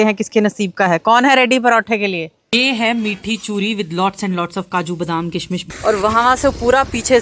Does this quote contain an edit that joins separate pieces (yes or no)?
yes